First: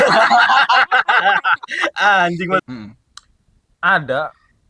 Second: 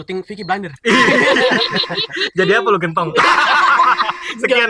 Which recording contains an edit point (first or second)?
first